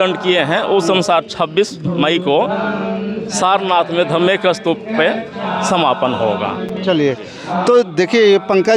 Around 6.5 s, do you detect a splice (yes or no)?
no